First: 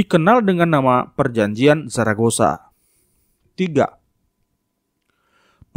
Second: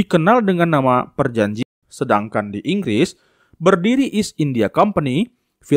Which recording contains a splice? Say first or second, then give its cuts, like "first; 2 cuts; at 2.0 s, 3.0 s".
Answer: second; 1 cut; at 1.6 s